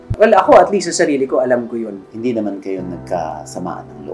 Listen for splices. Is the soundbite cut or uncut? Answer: cut